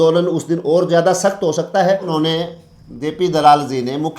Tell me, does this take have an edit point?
yes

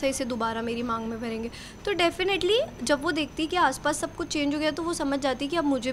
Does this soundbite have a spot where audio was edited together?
no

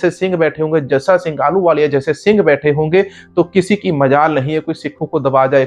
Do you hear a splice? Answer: no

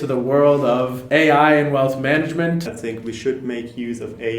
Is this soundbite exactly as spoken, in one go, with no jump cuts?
no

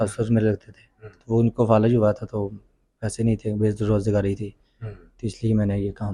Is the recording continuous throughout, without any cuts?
yes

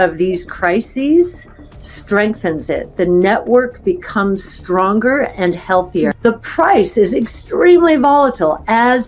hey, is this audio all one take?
no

